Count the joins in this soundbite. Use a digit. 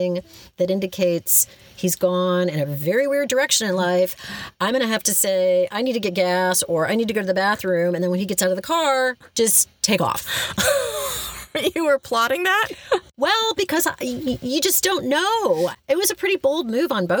1